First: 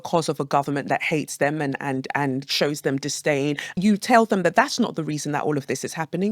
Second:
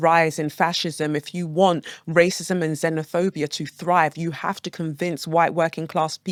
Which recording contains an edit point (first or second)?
first